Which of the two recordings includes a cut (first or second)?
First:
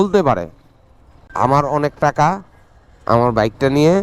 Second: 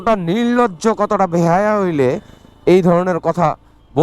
first